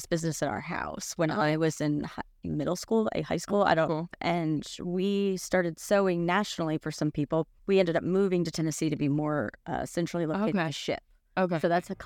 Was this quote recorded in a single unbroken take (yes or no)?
no